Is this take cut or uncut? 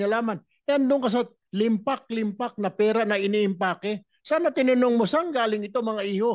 uncut